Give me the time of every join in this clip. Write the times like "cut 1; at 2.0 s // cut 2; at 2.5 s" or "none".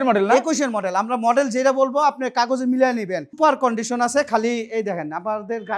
cut 1; at 3.4 s